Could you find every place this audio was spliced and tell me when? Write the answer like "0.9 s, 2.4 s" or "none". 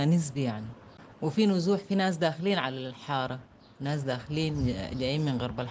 1.1 s